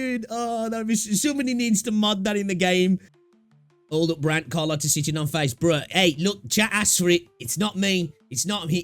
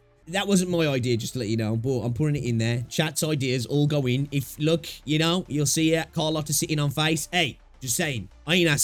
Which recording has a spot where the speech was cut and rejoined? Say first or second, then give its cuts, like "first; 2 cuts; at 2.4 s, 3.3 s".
first; 1 cut; at 3.1 s